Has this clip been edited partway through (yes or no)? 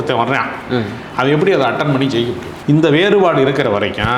yes